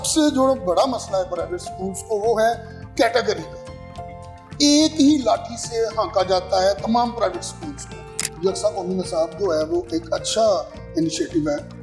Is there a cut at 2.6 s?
no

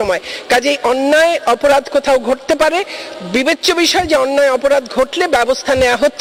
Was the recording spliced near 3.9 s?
no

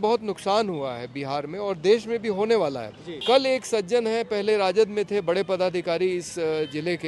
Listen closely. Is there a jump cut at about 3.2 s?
yes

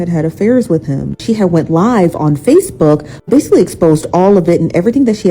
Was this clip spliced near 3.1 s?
yes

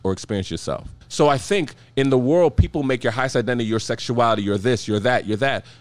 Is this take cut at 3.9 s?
no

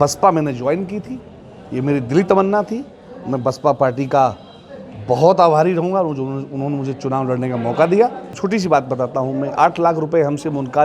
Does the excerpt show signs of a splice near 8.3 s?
yes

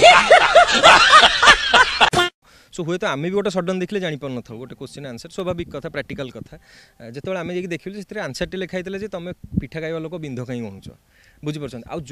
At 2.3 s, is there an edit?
yes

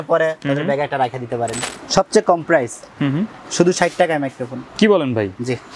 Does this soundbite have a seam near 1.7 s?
yes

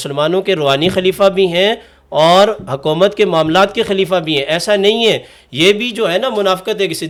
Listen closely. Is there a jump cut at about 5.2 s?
no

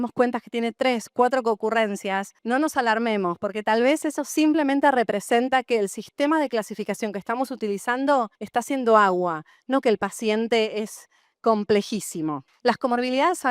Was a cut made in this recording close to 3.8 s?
no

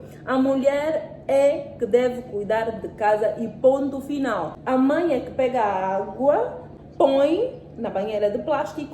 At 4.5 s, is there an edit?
yes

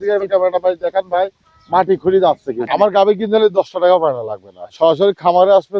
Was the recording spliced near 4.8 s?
no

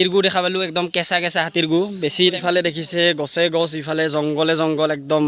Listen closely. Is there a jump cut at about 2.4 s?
yes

